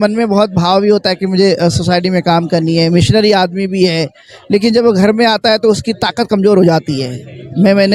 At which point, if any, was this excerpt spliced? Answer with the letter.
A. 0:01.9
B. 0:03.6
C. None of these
C